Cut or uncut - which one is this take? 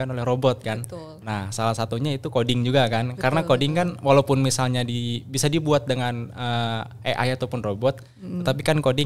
uncut